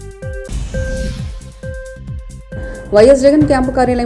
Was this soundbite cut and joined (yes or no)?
no